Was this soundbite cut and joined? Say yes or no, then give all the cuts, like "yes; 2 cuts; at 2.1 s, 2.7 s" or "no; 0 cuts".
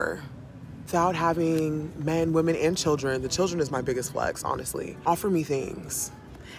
yes; 2 cuts; at 0.9 s, 5.0 s